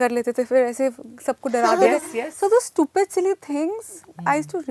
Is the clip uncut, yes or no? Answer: yes